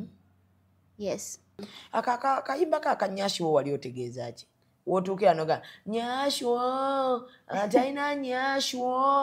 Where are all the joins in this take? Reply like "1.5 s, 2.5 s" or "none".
1.7 s